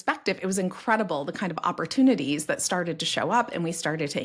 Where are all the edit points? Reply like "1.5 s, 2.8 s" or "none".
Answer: none